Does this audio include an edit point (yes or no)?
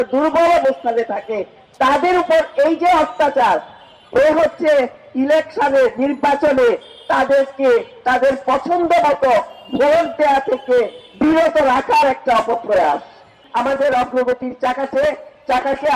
yes